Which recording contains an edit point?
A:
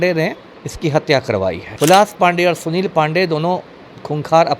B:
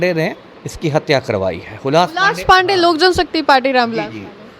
A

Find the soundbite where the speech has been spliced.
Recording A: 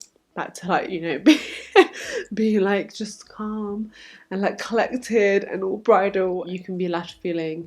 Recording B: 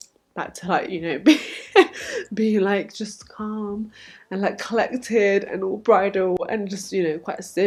A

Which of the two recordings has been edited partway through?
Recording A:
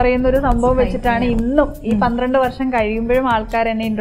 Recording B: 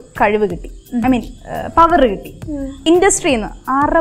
B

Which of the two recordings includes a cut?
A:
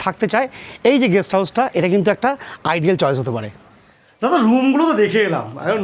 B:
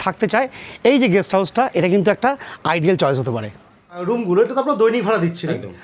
B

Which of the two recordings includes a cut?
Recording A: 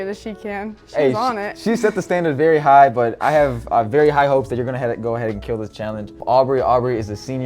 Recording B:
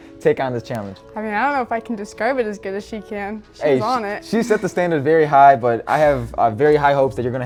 A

